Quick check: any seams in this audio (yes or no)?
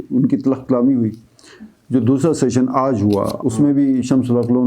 yes